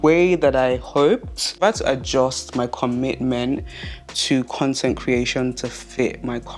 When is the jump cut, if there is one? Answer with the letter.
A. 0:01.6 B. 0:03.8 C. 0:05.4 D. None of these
A